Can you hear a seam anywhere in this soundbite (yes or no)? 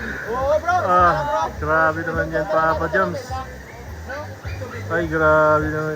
no